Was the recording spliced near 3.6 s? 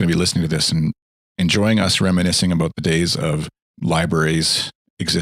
yes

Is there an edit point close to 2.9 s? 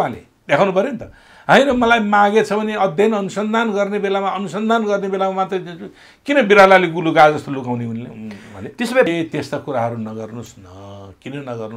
no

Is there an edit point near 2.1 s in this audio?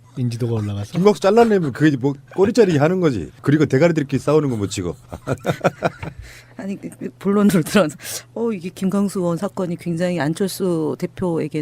no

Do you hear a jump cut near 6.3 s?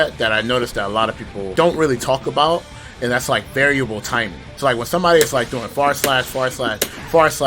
no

